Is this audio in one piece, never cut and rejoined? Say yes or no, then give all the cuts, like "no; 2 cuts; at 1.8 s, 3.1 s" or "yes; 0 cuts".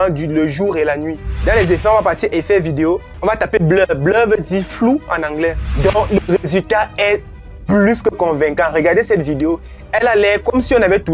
no; 3 cuts; at 1.3 s, 5.7 s, 9.7 s